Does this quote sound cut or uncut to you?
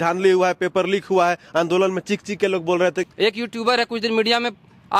cut